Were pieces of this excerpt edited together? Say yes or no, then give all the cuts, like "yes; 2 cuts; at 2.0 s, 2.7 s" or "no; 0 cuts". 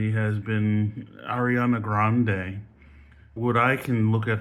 yes; 1 cut; at 3.3 s